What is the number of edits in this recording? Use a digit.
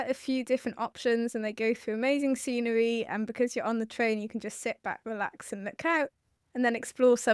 0